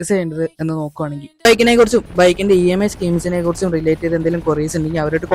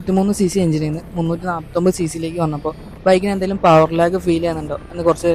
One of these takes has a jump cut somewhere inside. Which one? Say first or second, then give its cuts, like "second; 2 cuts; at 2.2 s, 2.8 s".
first; 1 cut; at 1.4 s